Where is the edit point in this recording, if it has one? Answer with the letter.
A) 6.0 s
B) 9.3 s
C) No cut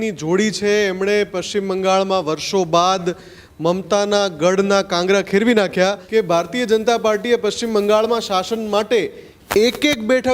A